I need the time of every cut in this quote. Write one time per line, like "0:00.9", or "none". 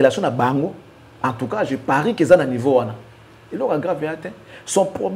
none